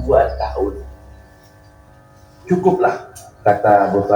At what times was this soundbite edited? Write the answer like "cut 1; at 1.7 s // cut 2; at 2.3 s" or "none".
cut 1; at 1.9 s